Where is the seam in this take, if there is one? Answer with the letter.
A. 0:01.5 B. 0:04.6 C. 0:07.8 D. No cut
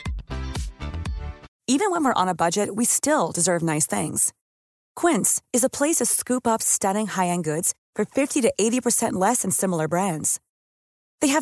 A